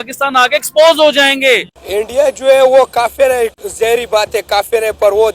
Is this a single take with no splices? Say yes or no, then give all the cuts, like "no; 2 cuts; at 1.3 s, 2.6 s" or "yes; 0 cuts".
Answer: no; 2 cuts; at 1.8 s, 3.6 s